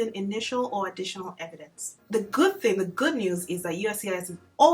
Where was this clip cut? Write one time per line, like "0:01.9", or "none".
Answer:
0:02.0